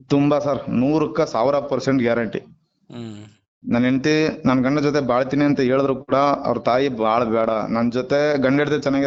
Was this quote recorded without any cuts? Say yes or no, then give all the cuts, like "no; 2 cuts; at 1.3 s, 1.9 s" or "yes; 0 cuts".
yes; 0 cuts